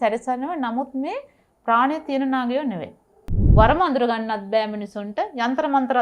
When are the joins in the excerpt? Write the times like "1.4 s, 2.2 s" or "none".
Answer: 3.4 s